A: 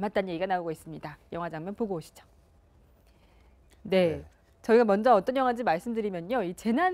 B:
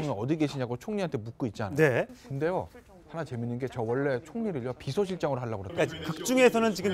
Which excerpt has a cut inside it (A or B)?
B